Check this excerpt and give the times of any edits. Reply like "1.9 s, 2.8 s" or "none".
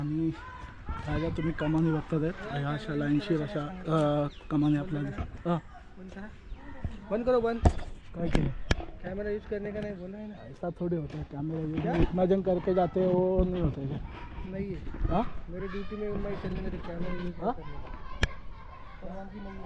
none